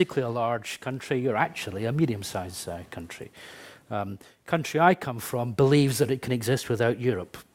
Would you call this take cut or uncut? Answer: cut